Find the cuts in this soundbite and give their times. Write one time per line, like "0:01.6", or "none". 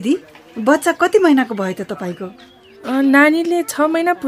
none